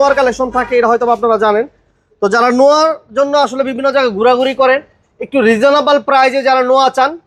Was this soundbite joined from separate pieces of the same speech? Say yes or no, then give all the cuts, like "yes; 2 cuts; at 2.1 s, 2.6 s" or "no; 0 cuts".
no; 0 cuts